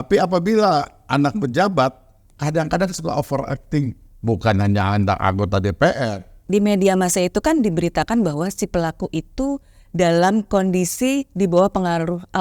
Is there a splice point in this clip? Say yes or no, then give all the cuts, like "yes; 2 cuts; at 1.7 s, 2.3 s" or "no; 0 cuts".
yes; 1 cut; at 6.3 s